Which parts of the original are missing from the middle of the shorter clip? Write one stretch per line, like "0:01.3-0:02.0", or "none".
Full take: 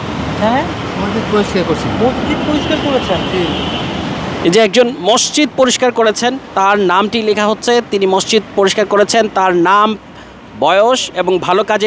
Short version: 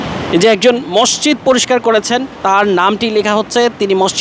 none